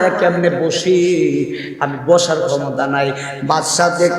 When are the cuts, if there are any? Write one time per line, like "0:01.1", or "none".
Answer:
none